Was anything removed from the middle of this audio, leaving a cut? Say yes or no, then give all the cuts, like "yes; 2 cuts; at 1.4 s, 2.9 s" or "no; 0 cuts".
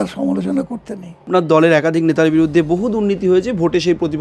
yes; 1 cut; at 1.3 s